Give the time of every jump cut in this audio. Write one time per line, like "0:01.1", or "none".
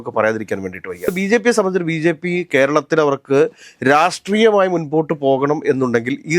0:01.1